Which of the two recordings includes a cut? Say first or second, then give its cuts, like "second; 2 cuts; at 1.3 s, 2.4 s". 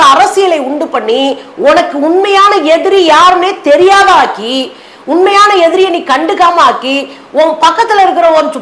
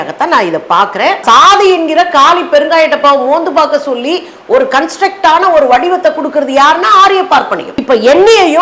second; 2 cuts; at 1.2 s, 7.7 s